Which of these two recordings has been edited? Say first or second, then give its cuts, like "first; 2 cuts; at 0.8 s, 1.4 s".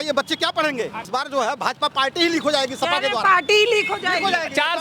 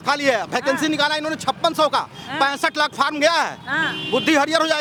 first; 1 cut; at 1.0 s